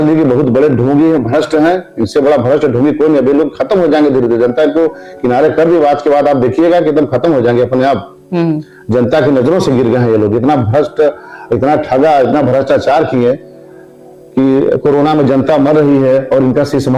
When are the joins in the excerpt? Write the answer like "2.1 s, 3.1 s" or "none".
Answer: none